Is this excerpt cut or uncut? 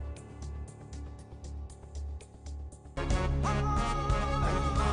uncut